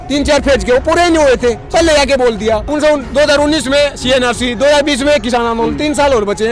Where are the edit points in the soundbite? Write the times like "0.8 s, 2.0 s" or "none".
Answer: 2.7 s